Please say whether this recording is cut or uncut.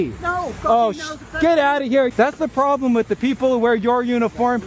cut